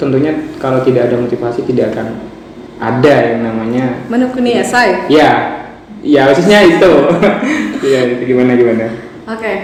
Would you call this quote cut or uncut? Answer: uncut